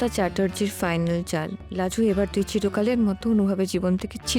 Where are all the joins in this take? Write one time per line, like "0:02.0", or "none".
0:01.6